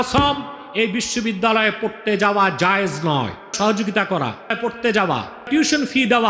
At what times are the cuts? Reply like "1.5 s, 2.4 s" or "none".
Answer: 3.5 s, 4.6 s, 5.5 s